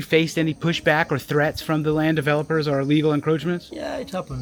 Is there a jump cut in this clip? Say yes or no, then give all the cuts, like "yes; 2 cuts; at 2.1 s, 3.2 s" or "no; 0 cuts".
no; 0 cuts